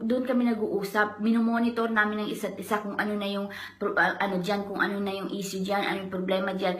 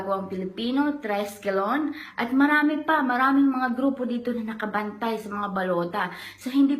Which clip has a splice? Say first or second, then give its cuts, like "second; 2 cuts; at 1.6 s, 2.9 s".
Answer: first; 1 cut; at 1.7 s